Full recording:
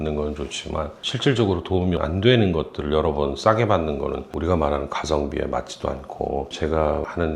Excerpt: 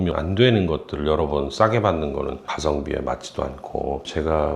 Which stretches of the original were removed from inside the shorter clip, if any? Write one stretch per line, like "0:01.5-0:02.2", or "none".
0:04.3-0:04.9